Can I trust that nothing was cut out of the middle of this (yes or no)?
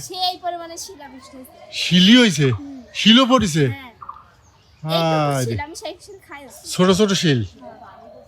yes